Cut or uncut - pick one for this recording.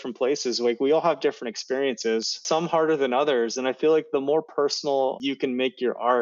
cut